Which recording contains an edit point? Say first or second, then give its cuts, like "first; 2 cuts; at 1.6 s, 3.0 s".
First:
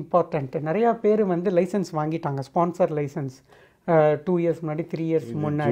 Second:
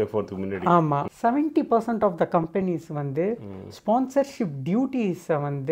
second; 1 cut; at 1.1 s